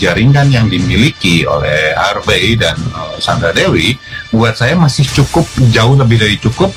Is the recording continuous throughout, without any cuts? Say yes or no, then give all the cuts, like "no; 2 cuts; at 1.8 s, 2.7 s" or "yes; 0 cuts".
yes; 0 cuts